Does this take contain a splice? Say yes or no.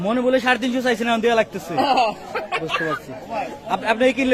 no